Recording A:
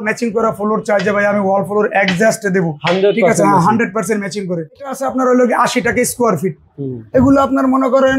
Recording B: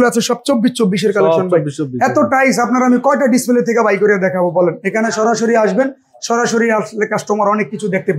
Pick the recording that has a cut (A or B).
A